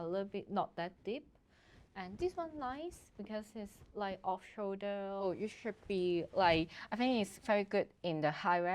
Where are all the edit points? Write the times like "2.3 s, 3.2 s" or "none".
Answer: 5.2 s